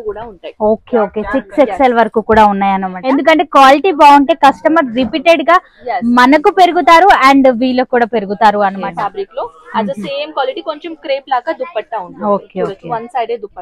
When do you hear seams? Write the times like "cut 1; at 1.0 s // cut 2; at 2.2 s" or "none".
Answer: cut 1; at 2.9 s // cut 2; at 8.8 s